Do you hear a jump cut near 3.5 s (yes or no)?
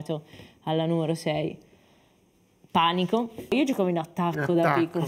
yes